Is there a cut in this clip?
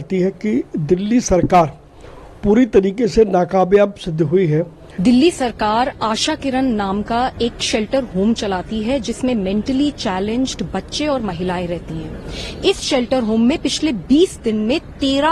yes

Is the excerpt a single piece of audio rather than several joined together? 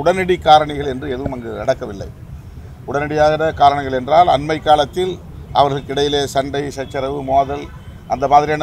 yes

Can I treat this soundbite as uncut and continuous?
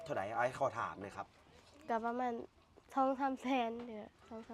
yes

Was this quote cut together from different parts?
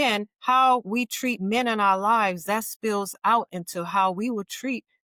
no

